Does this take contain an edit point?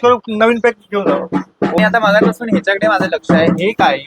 yes; 1 cut; at 1.8 s

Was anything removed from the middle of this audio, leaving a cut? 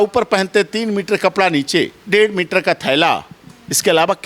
yes; 1 cut; at 2.0 s

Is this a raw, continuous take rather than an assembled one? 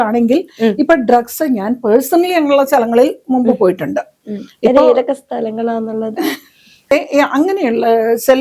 no; 1 cut; at 6.9 s

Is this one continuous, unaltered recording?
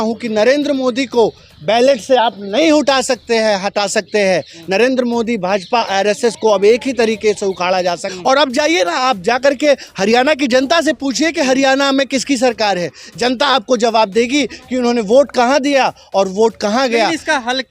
no; 1 cut; at 8.1 s

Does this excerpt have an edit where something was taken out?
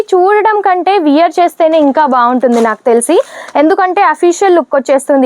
no; 0 cuts

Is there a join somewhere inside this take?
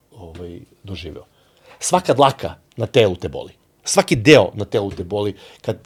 no; 0 cuts

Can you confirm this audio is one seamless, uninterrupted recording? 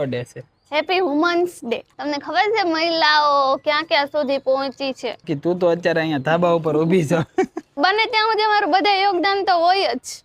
no; 3 cuts; at 2.0 s, 5.3 s, 7.8 s

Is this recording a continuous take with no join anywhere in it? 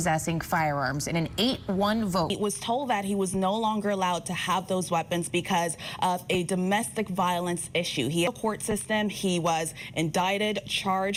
yes; 0 cuts

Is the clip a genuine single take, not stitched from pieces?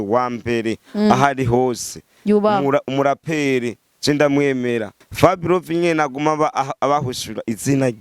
no; 1 cut; at 5.0 s

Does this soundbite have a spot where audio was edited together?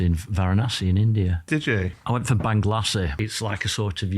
yes; 2 cuts; at 1.9 s, 3.2 s

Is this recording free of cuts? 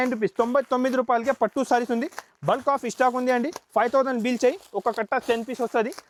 yes; 0 cuts

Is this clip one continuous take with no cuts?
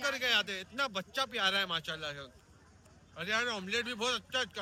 yes; 0 cuts

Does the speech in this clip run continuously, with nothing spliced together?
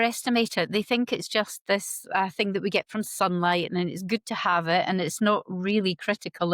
yes; 0 cuts

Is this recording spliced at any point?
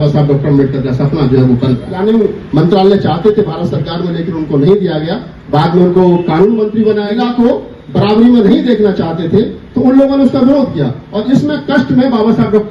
yes; 2 cuts; at 1.9 s, 7.2 s

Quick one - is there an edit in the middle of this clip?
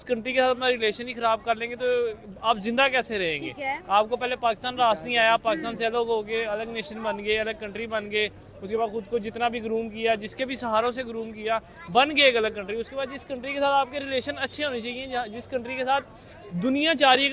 no; 0 cuts

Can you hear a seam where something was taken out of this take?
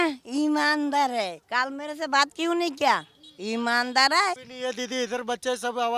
yes; 2 cuts; at 1.4 s, 4.5 s

